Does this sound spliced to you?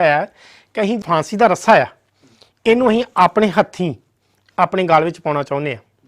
yes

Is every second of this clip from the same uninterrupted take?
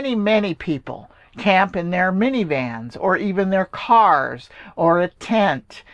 yes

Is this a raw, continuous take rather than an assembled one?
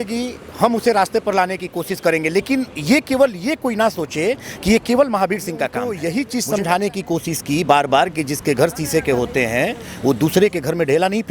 no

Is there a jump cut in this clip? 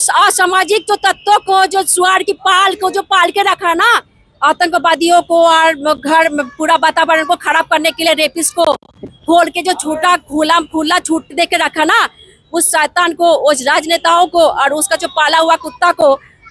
no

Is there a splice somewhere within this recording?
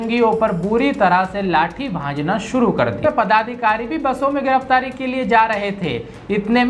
yes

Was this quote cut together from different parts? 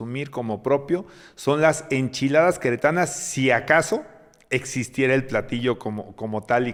no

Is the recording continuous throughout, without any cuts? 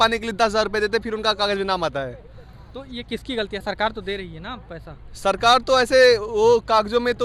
yes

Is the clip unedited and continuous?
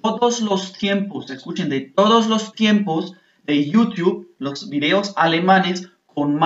yes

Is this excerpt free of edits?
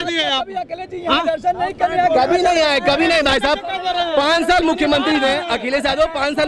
yes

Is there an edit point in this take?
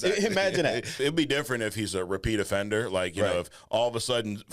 yes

